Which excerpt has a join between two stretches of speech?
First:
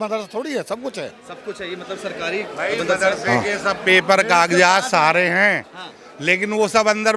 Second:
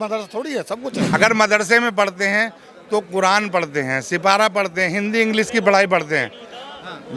second; 1 cut; at 1.1 s

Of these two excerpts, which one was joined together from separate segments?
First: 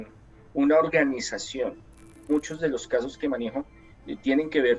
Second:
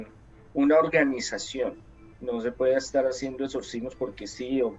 first; 1 cut; at 2.1 s

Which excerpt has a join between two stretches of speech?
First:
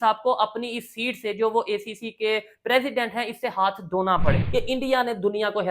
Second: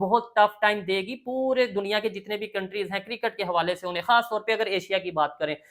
first; 1 cut; at 4.4 s

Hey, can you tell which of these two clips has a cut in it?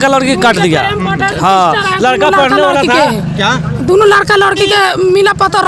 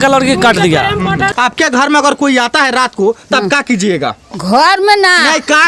second; 1 cut; at 1.3 s

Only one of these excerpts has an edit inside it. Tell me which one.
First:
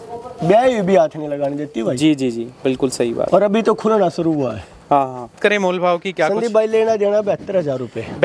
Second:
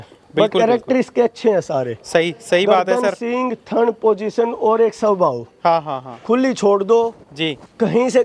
first; 1 cut; at 5.4 s

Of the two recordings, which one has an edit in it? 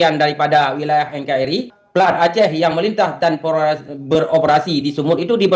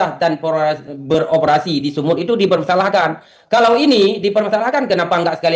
first; 1 cut; at 1.8 s

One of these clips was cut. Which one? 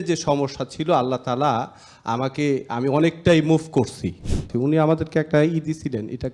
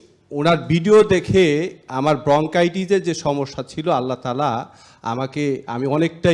first; 1 cut; at 4.5 s

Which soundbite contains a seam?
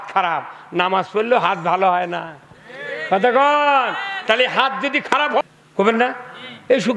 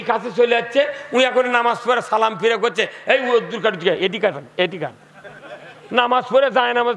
first; 1 cut; at 5.4 s

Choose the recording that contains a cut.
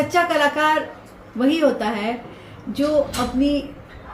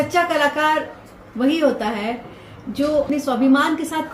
second; 1 cut; at 3.1 s

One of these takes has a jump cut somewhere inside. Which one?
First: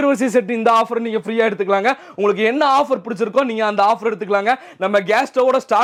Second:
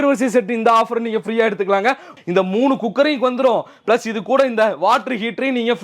second; 1 cut; at 2.1 s

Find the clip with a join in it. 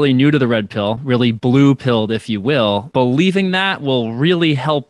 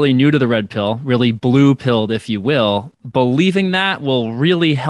first; 1 cut; at 2.8 s

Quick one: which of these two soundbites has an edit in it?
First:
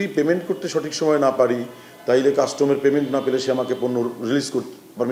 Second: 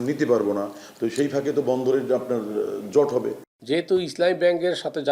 second; 1 cut; at 3.5 s

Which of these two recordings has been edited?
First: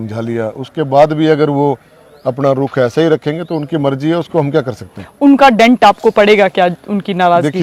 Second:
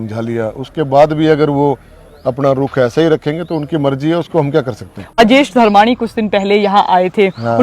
second; 1 cut; at 5.2 s

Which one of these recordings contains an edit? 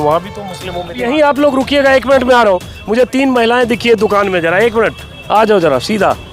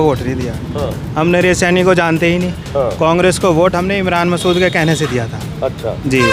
first; 1 cut; at 0.9 s

